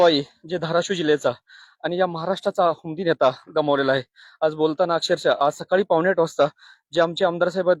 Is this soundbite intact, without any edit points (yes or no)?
yes